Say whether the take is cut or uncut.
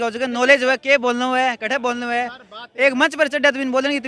uncut